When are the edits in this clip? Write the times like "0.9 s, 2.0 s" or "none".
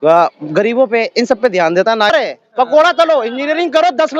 2.1 s